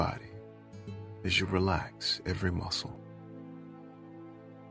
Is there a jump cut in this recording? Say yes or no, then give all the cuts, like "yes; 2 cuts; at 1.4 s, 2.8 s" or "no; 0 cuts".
yes; 1 cut; at 2.8 s